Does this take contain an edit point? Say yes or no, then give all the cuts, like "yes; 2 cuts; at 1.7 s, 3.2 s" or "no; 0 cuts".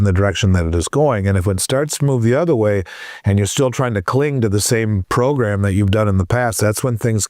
yes; 1 cut; at 5.0 s